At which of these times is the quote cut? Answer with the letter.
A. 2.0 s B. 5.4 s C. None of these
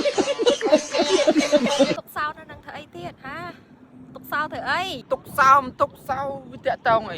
A